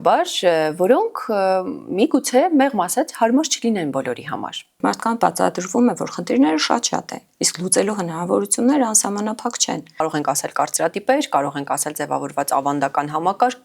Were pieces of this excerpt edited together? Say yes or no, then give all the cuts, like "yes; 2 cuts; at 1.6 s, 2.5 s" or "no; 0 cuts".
yes; 2 cuts; at 4.8 s, 10.0 s